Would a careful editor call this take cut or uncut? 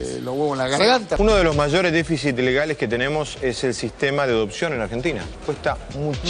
cut